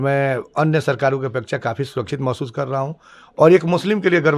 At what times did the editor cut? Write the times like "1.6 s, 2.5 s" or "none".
3.2 s